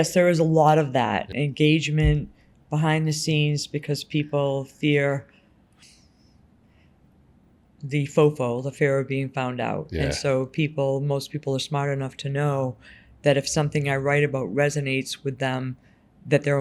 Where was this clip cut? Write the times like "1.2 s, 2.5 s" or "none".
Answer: 1.3 s, 5.8 s